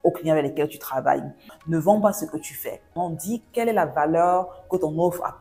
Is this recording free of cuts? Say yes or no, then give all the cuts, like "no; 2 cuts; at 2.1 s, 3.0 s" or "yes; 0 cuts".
no; 2 cuts; at 1.5 s, 2.9 s